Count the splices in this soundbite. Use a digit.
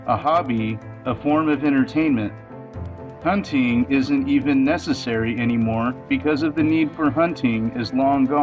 0